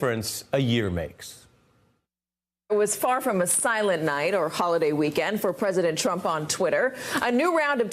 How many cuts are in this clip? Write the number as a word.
one